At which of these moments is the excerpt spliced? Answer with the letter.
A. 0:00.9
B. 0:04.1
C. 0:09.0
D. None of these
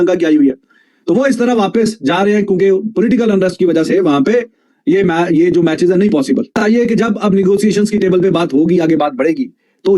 D